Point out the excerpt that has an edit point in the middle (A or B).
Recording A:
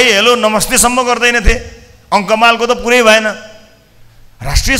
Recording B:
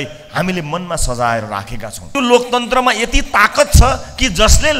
B